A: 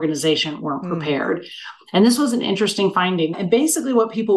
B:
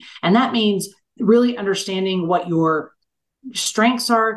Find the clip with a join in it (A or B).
A